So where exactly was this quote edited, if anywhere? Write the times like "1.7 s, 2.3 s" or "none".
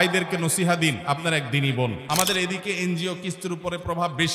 1.0 s, 2.0 s